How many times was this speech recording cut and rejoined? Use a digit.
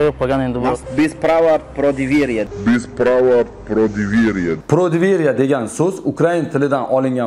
2